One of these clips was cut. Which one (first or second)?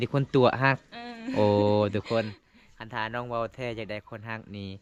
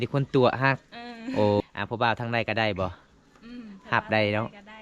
second